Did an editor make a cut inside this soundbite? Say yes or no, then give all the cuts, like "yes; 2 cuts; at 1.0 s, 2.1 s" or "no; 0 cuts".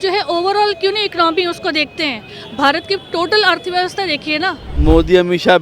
yes; 1 cut; at 4.6 s